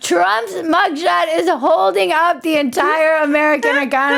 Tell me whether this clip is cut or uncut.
uncut